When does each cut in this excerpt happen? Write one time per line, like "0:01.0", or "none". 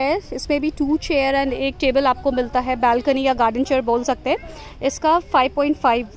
none